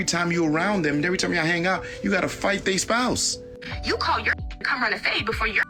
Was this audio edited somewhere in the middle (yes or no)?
no